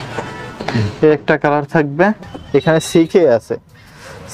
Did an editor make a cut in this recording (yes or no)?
yes